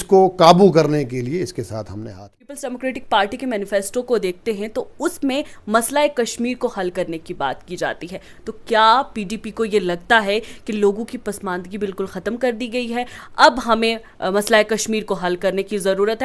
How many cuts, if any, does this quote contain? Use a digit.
1